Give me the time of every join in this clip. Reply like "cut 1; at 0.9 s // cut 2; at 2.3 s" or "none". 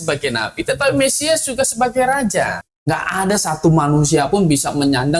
cut 1; at 2.7 s

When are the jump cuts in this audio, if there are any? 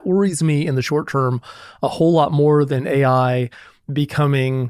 none

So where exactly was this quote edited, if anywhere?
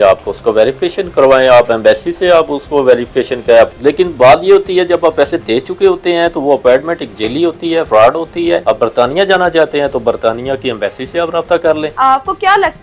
cut 1; at 3.7 s // cut 2; at 8.6 s // cut 3; at 11.9 s

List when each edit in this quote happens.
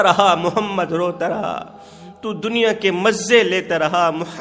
none

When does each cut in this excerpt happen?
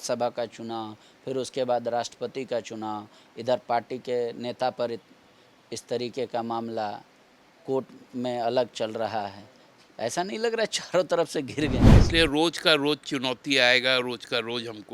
cut 1; at 11.9 s

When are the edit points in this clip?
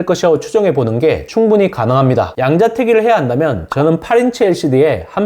cut 1; at 2.3 s

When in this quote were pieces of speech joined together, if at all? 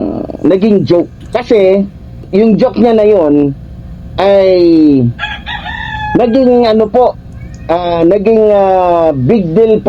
cut 1; at 1.2 s // cut 2; at 2.3 s

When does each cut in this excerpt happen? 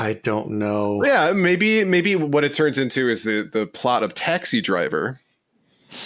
cut 1; at 1.0 s

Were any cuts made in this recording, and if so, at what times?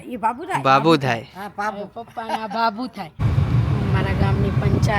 cut 1; at 3.3 s

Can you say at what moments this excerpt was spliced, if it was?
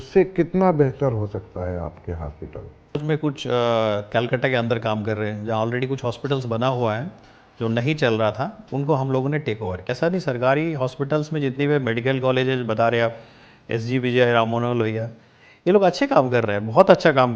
cut 1; at 3.0 s // cut 2; at 10.0 s

